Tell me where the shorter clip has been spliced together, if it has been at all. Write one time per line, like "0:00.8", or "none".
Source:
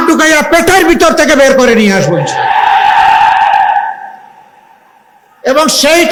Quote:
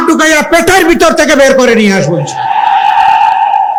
none